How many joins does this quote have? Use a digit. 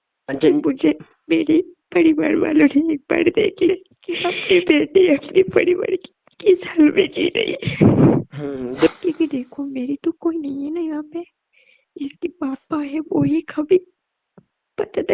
2